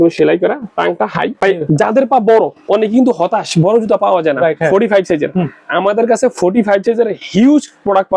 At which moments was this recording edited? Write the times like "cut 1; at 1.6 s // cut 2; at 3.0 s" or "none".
cut 1; at 1.3 s